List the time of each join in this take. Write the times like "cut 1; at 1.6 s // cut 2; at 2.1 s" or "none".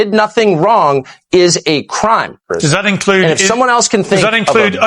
cut 1; at 2.5 s